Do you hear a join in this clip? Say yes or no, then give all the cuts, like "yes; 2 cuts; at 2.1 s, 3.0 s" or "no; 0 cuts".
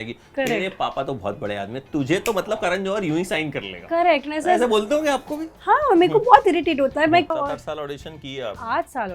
yes; 1 cut; at 7.3 s